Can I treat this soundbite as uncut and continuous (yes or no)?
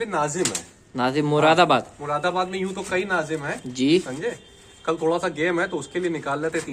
yes